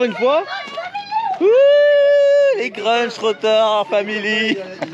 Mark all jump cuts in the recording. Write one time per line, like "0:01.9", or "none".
none